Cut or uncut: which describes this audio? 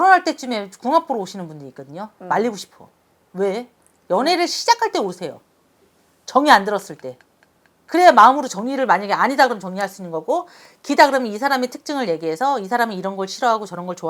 uncut